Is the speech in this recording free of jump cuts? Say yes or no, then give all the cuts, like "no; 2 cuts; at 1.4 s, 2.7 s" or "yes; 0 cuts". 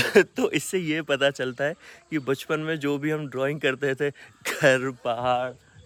yes; 0 cuts